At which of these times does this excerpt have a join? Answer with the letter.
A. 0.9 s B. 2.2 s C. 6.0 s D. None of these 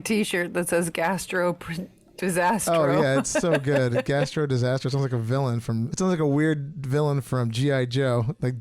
D